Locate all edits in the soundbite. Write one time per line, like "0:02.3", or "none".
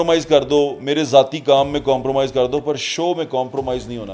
none